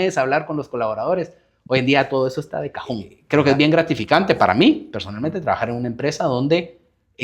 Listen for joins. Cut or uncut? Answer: cut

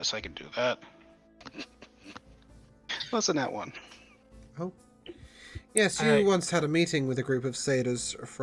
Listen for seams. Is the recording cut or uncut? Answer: cut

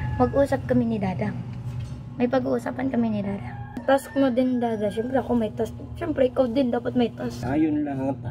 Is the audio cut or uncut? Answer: cut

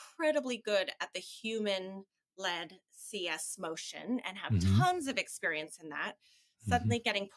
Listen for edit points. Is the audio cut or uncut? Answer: uncut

